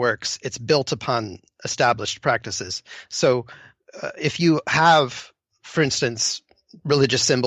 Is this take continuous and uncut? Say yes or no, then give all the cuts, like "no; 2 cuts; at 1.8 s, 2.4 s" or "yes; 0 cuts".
yes; 0 cuts